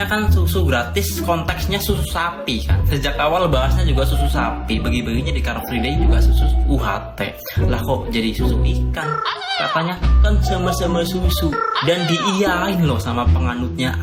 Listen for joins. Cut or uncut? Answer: uncut